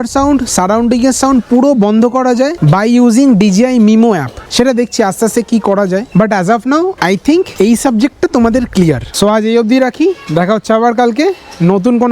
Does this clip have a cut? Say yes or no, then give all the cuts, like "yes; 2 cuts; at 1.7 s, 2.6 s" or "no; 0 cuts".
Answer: no; 0 cuts